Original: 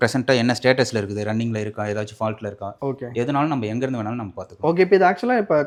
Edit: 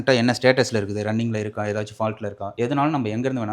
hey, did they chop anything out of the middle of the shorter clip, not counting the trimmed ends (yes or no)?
yes